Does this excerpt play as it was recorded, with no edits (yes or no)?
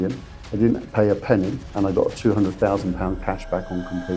yes